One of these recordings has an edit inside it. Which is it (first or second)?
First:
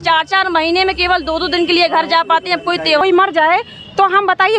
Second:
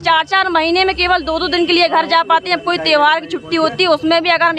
first